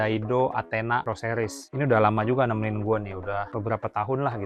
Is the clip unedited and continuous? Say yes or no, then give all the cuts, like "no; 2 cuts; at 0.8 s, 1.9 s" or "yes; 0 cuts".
yes; 0 cuts